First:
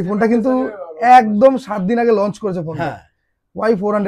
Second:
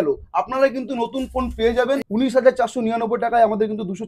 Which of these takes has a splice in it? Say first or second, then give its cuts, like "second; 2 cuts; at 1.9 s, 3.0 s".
second; 1 cut; at 2.0 s